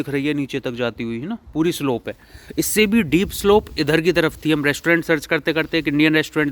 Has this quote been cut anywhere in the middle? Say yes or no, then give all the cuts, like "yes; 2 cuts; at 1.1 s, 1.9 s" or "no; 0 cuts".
no; 0 cuts